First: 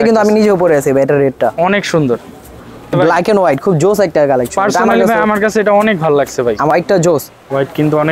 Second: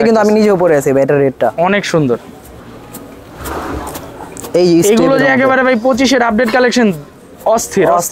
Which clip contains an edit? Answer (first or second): first